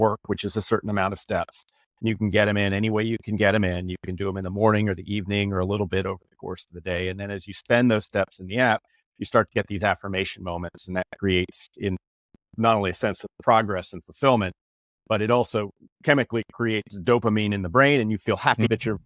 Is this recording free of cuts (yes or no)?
yes